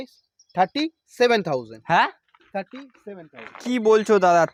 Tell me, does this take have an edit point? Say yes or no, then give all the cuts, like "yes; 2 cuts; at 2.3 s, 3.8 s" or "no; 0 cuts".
no; 0 cuts